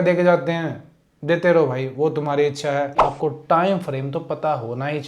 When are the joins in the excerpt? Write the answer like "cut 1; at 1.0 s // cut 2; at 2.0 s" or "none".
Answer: cut 1; at 3.0 s